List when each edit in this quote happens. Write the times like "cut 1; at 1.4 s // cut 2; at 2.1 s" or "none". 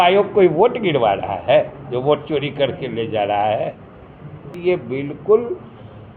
cut 1; at 4.5 s